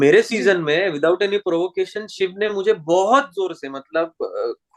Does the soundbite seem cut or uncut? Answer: uncut